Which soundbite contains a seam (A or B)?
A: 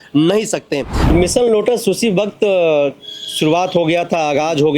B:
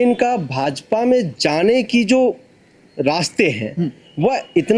A